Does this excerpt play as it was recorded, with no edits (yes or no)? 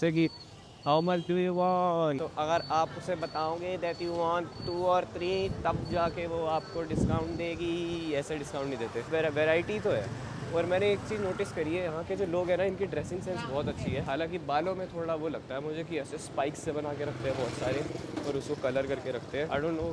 yes